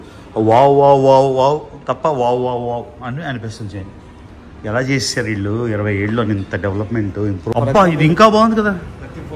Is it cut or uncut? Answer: cut